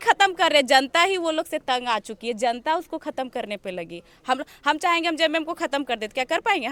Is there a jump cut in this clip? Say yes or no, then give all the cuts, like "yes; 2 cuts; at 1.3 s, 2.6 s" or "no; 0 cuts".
no; 0 cuts